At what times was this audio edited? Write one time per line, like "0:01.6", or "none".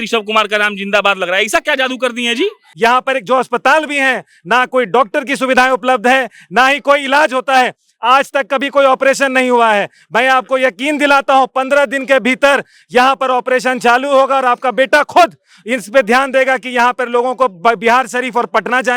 0:02.6